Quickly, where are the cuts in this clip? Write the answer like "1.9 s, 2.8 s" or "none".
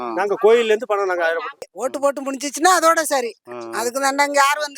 1.6 s